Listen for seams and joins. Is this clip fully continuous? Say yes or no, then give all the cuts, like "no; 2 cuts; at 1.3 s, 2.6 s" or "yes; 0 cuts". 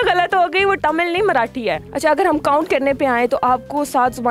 no; 2 cuts; at 0.8 s, 1.9 s